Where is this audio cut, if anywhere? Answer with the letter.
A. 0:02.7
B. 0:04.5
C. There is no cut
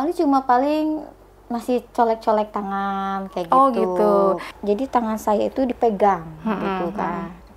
B